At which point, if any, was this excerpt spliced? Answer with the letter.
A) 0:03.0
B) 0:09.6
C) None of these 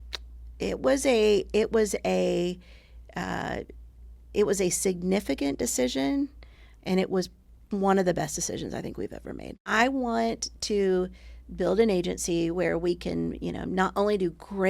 B